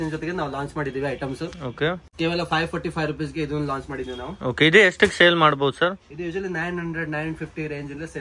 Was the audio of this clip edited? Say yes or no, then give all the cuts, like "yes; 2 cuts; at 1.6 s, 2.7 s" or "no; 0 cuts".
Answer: no; 0 cuts